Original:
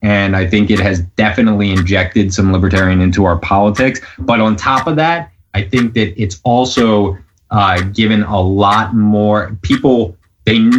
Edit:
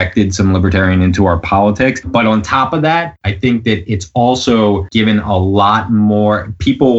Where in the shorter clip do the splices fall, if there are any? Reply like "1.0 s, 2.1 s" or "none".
2.0 s, 3.2 s, 4.9 s